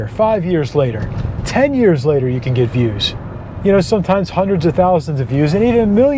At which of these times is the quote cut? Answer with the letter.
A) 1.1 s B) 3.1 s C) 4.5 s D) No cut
B